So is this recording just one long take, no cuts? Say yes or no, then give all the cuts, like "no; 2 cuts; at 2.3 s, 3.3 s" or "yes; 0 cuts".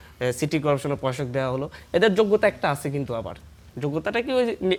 yes; 0 cuts